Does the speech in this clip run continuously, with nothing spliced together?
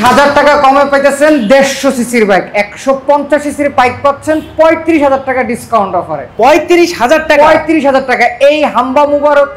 yes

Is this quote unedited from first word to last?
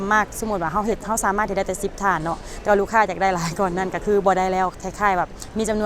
no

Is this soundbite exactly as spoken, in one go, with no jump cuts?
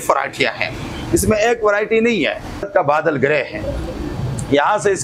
no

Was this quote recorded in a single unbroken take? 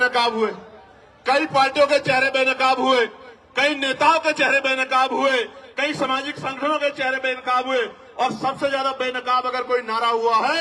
yes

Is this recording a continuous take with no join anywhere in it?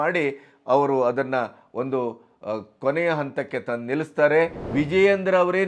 no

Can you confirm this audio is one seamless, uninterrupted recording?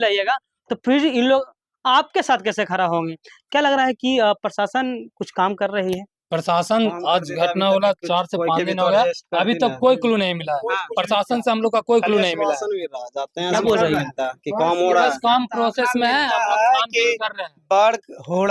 yes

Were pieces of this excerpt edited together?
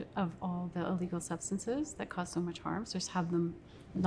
no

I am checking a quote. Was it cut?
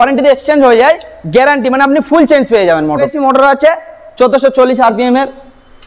yes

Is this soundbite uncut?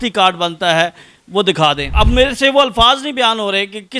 no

